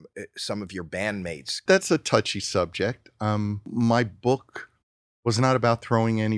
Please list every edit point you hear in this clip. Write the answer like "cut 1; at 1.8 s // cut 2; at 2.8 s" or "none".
cut 1; at 1.6 s // cut 2; at 3.6 s